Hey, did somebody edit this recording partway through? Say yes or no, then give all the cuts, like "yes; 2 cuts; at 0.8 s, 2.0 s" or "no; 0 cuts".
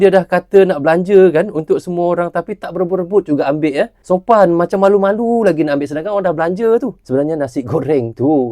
yes; 2 cuts; at 4.0 s, 7.0 s